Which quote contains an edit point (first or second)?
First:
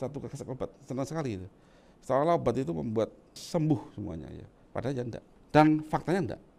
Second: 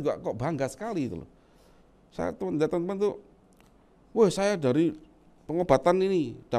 first